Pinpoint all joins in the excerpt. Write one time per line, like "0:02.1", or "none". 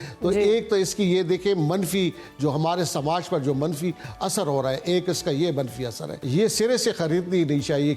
0:06.1